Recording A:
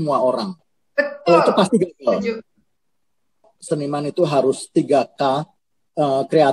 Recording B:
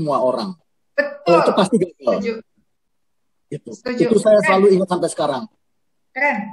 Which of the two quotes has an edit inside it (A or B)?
A